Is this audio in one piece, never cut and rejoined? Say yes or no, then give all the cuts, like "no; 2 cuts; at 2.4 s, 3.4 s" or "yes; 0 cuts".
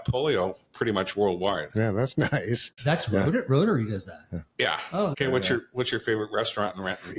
no; 2 cuts; at 2.7 s, 5.1 s